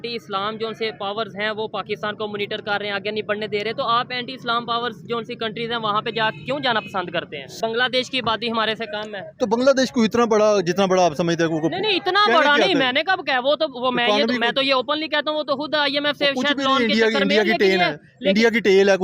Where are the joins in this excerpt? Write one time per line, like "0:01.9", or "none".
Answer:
0:07.5

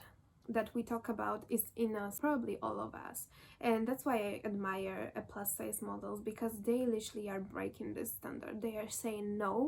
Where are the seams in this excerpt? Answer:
0:02.1

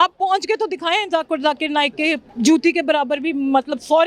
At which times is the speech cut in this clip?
0:02.3

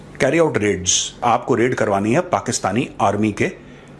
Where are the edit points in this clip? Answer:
0:01.2

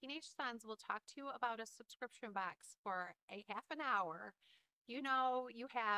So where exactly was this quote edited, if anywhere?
none

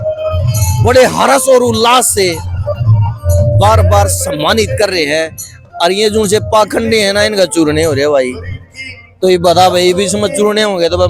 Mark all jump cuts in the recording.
none

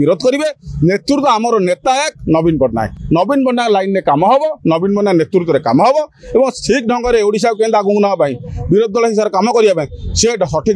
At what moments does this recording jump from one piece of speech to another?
none

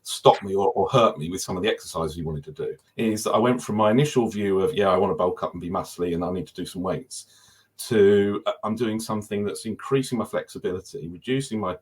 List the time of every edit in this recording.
0:02.8

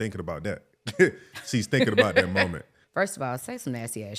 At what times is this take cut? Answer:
0:02.8

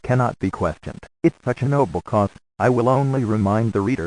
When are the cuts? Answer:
0:02.1

